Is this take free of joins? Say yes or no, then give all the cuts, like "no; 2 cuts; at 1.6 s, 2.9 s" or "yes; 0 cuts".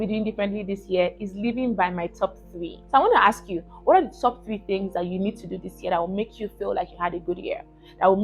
no; 1 cut; at 2.7 s